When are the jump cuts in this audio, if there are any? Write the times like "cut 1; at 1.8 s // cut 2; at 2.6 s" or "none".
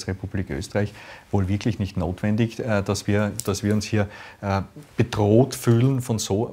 none